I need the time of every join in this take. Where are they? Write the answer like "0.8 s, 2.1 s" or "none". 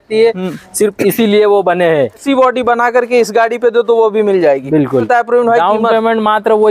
2.2 s, 5.1 s